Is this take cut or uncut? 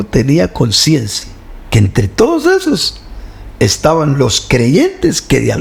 uncut